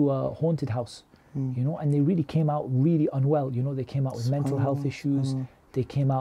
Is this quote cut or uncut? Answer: uncut